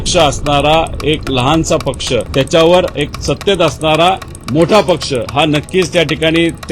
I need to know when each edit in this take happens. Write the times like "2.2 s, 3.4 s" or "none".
2.3 s, 3.2 s, 5.3 s